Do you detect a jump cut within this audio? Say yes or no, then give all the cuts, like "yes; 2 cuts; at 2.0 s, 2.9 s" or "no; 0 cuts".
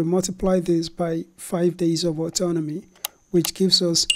no; 0 cuts